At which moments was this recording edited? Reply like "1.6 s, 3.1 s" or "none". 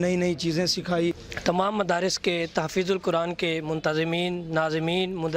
1.3 s